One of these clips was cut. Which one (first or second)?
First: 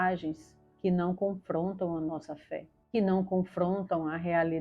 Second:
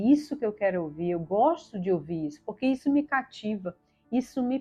first